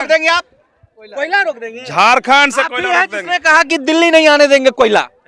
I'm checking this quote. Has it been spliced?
no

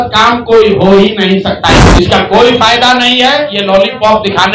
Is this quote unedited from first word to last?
no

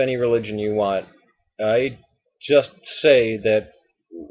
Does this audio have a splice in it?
no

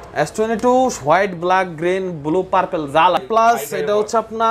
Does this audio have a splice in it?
yes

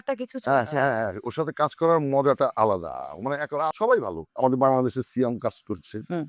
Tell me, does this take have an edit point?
yes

